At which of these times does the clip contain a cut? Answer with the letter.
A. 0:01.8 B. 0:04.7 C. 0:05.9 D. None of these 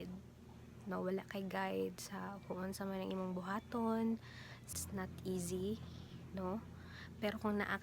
B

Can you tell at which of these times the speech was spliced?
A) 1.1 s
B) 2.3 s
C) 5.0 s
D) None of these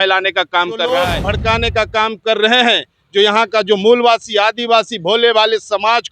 A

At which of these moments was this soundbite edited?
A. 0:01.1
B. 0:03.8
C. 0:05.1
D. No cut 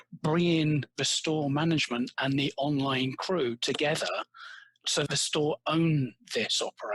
C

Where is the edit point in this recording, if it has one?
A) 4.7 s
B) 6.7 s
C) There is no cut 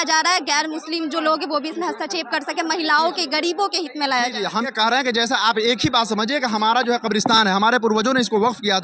A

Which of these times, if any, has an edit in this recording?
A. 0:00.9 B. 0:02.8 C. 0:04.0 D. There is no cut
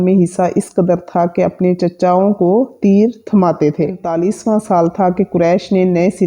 C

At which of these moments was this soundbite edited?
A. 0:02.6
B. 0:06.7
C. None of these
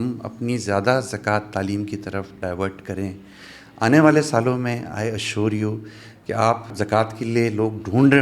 B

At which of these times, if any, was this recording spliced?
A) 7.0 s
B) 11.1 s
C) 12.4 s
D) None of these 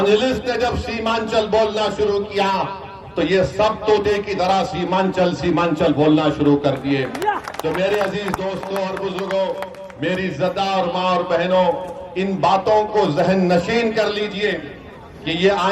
D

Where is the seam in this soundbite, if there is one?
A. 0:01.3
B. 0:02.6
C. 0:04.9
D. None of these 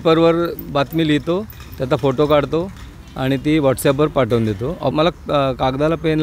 C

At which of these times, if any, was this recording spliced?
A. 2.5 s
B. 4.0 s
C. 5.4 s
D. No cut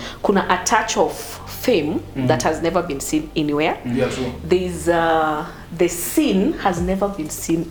D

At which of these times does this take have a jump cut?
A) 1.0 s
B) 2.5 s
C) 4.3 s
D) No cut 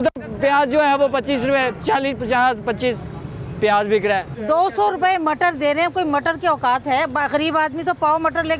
C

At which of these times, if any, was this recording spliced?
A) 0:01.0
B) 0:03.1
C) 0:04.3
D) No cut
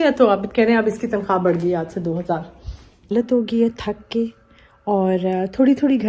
B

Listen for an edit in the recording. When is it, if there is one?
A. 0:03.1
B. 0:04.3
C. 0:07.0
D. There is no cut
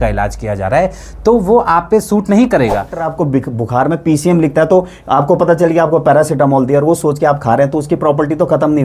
A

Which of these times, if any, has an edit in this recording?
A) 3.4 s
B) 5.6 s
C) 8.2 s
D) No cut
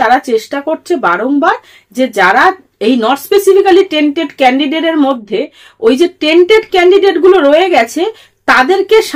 D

